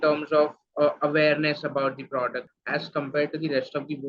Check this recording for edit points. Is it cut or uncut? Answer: cut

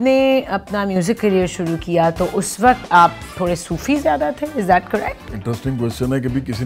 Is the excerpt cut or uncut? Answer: cut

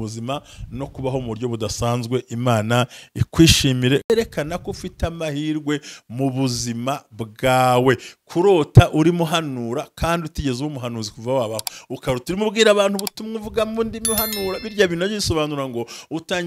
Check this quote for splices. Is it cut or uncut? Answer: cut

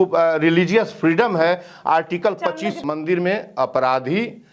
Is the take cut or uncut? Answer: cut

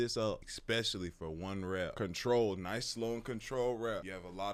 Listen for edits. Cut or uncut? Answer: uncut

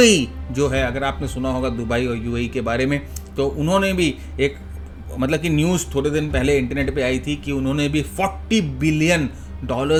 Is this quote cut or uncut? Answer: uncut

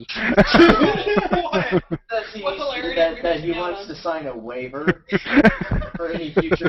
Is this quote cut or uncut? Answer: uncut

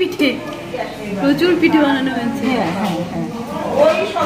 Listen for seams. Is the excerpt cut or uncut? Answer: uncut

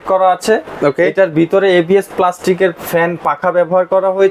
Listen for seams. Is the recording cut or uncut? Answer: uncut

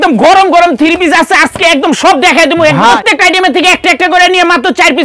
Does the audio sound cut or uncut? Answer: cut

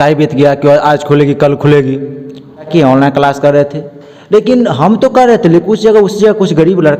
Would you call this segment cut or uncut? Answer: cut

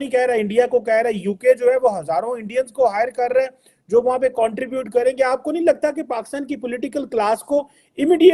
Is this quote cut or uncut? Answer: uncut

